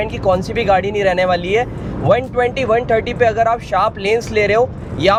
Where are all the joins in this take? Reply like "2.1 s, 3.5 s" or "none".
none